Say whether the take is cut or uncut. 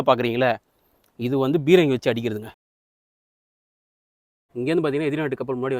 uncut